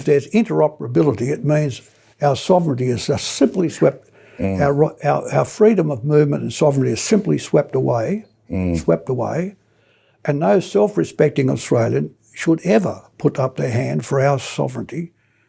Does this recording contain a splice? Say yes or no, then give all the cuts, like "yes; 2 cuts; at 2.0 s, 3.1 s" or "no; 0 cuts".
no; 0 cuts